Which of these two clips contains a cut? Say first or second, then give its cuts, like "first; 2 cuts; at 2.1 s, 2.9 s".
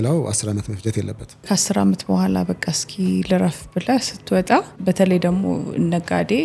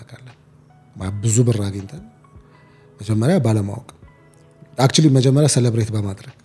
first; 2 cuts; at 1.5 s, 4.7 s